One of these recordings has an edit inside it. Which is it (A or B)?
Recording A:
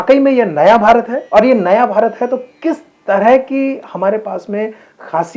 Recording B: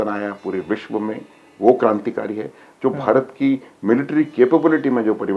A